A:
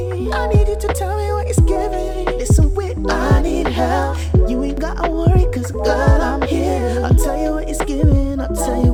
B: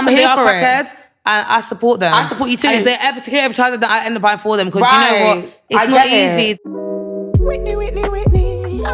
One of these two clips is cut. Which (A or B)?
B